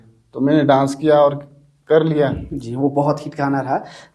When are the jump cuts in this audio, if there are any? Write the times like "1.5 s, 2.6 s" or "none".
none